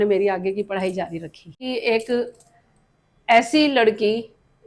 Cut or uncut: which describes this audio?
cut